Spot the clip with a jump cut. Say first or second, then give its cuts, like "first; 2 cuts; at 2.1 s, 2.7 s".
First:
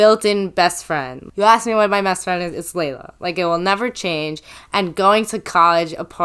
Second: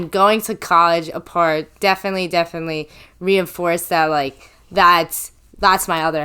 first; 1 cut; at 1.2 s